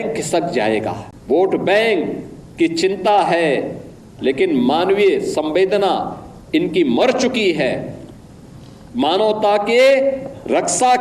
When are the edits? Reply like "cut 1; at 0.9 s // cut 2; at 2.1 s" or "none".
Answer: cut 1; at 1.1 s